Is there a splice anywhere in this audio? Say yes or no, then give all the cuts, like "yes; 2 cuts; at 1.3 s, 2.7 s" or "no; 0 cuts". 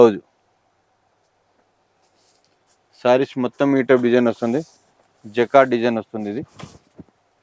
no; 0 cuts